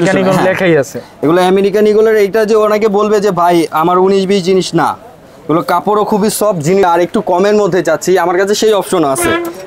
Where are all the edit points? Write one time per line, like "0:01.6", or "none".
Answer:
0:06.8